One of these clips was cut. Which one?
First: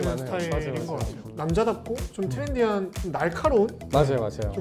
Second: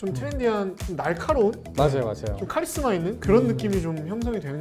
first; 1 cut; at 1.2 s

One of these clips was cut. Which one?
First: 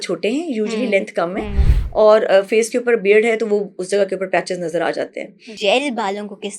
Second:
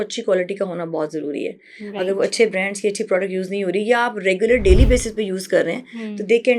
first; 1 cut; at 5.5 s

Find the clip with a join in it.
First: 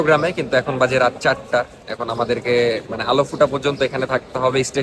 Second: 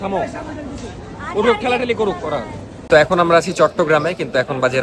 second; 1 cut; at 2.7 s

